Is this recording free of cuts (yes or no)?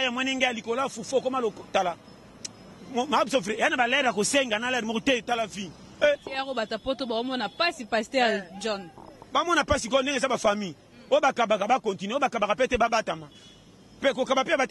no